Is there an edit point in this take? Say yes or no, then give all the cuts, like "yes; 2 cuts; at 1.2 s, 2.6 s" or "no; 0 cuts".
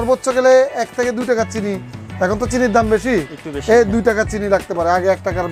no; 0 cuts